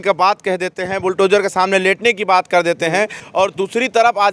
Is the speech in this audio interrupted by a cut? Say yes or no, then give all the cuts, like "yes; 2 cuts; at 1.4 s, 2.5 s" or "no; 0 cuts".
yes; 1 cut; at 3.2 s